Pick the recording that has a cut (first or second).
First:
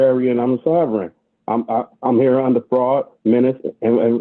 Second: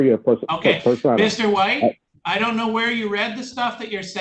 second